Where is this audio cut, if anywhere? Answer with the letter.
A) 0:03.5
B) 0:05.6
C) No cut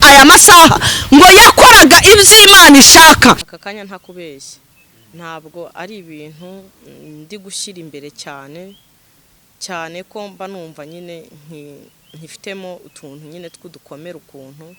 A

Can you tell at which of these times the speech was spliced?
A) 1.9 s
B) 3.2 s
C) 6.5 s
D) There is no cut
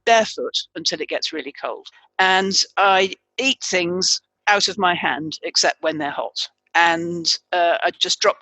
A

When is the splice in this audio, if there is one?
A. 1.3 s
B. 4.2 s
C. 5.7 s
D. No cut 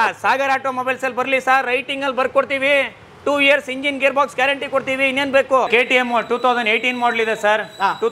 C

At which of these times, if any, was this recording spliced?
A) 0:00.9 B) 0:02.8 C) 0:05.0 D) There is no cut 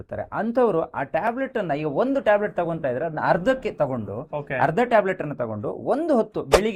D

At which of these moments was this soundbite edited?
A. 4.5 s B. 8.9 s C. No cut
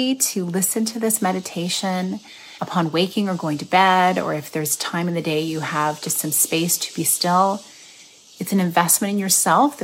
C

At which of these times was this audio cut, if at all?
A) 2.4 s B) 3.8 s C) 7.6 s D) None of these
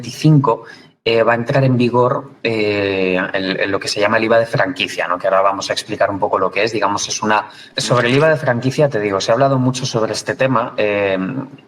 C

